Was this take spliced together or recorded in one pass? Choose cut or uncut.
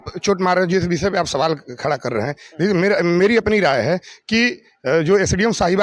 uncut